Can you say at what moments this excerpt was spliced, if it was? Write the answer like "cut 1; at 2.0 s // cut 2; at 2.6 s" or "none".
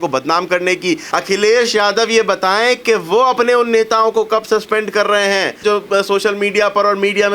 cut 1; at 1.0 s // cut 2; at 5.6 s